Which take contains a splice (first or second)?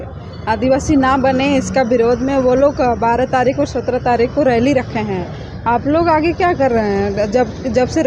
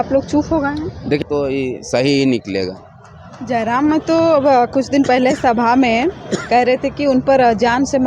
second